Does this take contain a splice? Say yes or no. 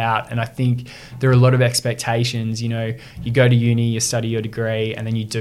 no